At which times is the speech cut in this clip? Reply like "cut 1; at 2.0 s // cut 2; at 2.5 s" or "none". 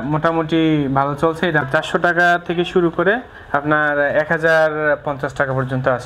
cut 1; at 1.7 s